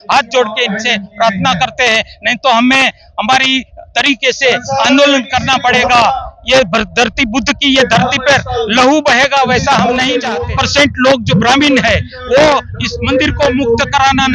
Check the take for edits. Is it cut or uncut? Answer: cut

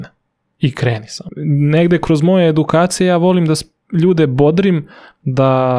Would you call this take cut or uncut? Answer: cut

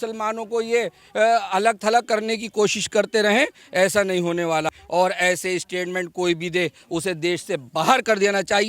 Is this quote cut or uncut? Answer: cut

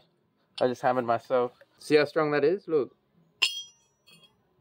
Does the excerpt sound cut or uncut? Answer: cut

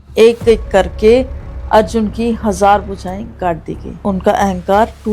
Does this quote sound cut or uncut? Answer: cut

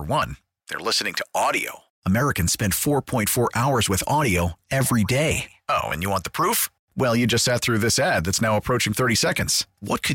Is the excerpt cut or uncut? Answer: uncut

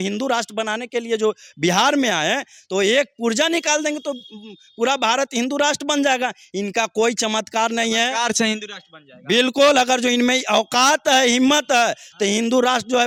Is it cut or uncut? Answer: uncut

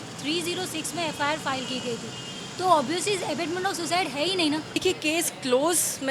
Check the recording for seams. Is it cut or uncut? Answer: cut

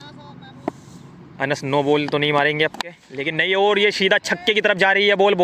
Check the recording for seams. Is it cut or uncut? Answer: uncut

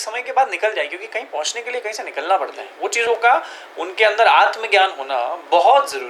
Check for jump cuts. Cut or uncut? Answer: uncut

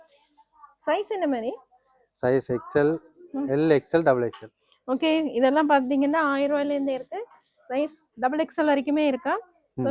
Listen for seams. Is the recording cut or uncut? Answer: uncut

